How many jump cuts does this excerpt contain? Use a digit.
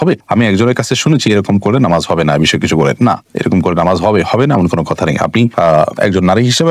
0